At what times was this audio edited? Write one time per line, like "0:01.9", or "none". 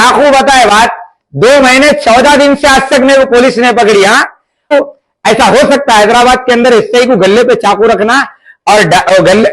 0:04.7